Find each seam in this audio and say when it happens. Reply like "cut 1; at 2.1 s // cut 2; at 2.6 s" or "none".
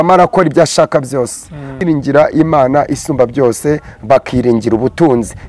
cut 1; at 1.8 s